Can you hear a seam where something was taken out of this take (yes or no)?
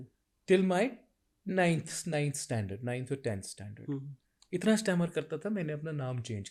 no